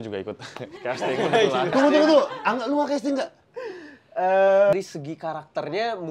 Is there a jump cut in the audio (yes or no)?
yes